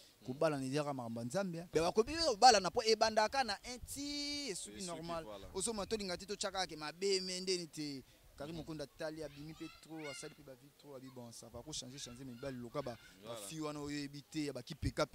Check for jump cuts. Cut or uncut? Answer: cut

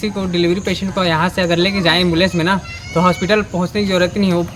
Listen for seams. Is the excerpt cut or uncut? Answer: uncut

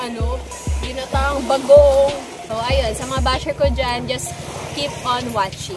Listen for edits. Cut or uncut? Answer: cut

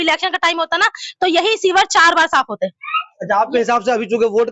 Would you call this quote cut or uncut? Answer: uncut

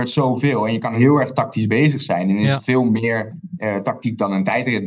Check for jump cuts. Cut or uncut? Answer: cut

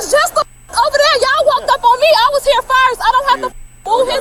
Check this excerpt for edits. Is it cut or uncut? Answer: uncut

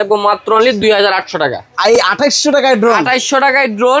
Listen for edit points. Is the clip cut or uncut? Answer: uncut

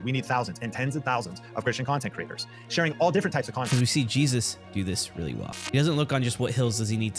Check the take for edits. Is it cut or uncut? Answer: cut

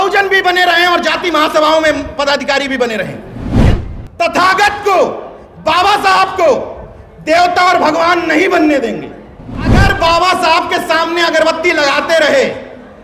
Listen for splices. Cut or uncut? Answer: cut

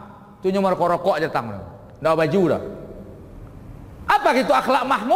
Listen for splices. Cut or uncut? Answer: uncut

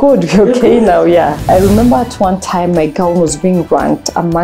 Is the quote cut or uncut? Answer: cut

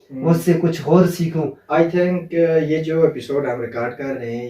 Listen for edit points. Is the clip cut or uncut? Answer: cut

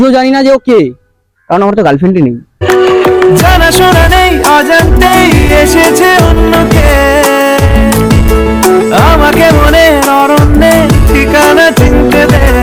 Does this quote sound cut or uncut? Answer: uncut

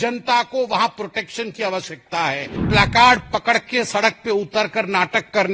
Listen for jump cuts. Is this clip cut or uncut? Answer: cut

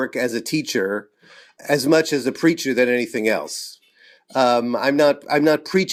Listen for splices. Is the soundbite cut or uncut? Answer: uncut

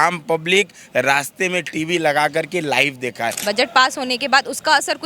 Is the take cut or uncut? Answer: cut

